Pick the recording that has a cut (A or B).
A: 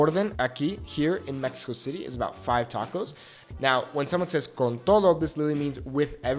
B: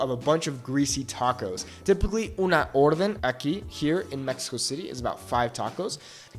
B